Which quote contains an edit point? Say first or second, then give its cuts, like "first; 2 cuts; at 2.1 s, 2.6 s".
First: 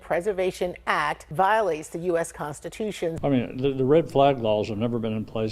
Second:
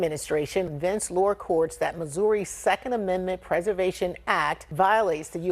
first; 1 cut; at 3.1 s